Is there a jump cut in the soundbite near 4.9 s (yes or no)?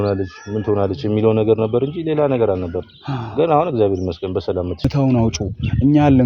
yes